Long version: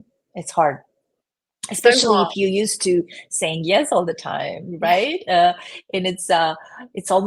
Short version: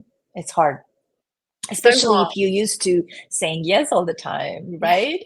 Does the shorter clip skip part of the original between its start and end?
no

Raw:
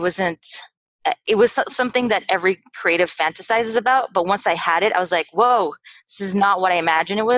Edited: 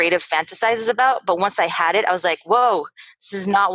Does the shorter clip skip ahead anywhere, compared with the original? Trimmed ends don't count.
no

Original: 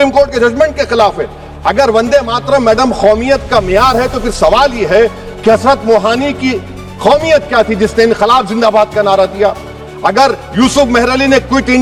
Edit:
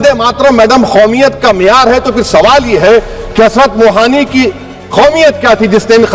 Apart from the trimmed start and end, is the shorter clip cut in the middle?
no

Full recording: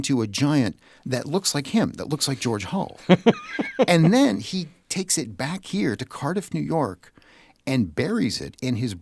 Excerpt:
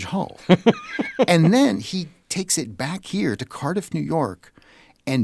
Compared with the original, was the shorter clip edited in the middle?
no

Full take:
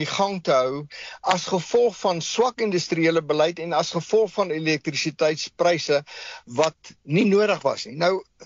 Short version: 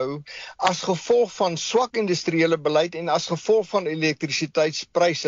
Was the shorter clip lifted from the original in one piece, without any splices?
yes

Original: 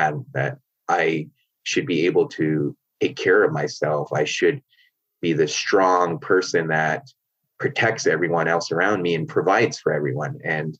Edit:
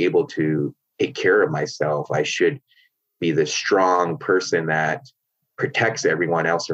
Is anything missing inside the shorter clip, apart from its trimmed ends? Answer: no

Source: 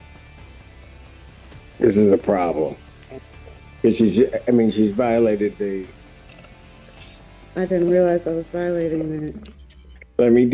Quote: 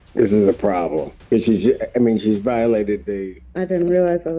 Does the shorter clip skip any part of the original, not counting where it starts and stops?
yes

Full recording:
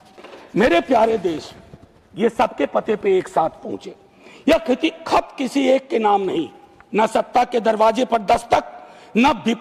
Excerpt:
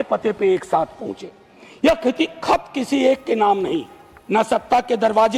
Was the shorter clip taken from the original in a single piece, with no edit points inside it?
yes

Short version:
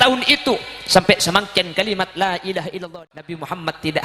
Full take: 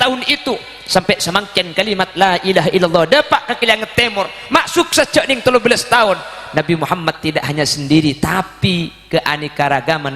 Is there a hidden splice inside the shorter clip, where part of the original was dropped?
yes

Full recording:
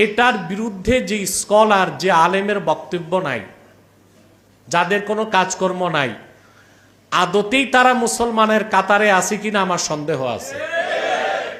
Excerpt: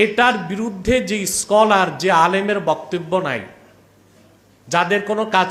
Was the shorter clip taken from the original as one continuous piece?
yes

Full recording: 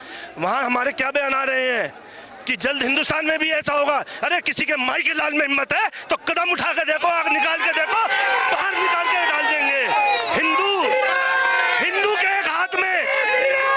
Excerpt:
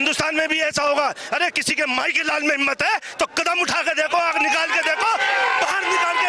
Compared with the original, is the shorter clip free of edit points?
yes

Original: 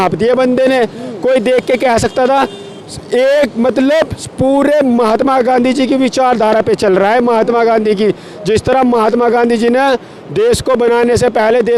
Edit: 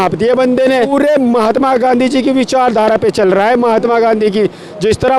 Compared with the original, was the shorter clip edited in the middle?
yes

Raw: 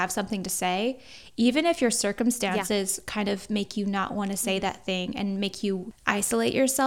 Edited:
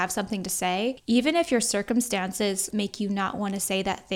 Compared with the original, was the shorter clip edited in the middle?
yes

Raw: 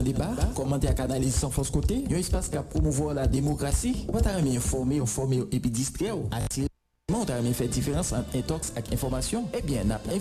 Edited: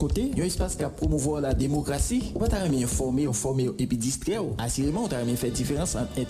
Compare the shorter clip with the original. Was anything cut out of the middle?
yes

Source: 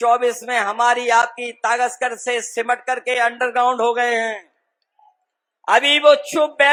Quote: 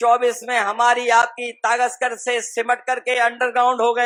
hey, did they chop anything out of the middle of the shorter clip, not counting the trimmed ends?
no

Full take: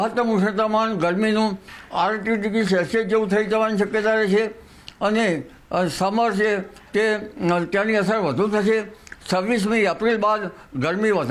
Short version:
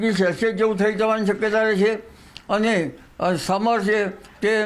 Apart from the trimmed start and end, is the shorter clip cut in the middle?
no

